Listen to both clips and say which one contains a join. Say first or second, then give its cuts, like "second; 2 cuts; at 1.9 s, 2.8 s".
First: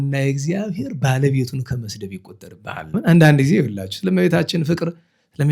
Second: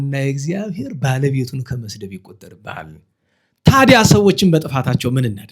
first; 1 cut; at 3.0 s